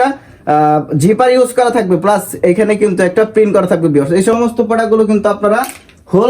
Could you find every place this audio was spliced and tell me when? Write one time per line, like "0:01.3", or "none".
0:04.3